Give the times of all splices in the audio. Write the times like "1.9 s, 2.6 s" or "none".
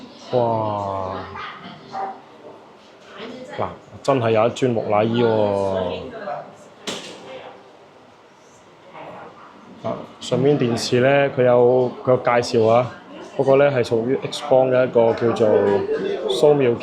none